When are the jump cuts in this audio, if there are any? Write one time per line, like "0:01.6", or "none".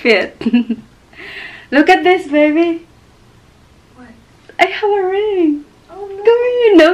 none

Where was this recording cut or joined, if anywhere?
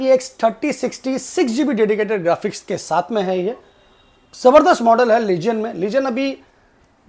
none

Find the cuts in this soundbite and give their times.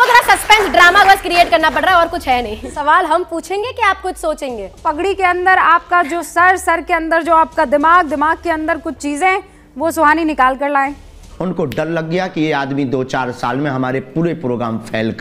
0:02.8
0:04.8
0:11.2

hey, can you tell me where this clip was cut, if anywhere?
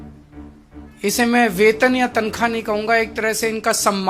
0:01.0

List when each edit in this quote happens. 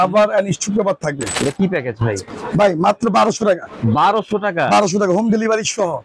0:01.3

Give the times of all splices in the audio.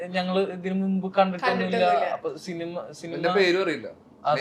none

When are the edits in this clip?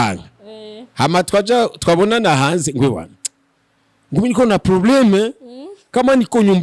none

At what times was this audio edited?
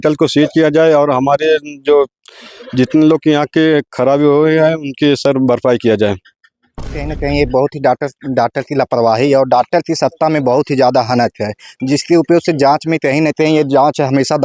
0:07.0

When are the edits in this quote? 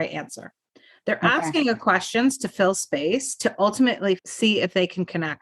0:04.2

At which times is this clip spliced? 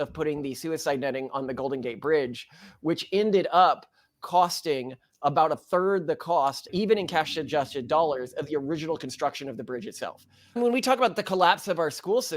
0:06.6
0:10.6

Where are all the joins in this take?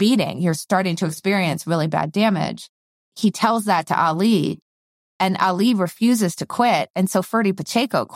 0:03.1

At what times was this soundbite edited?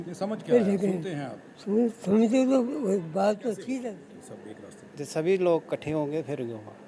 0:03.8

